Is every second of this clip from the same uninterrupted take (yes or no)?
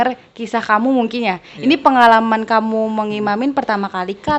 yes